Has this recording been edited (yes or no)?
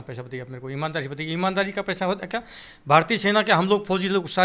no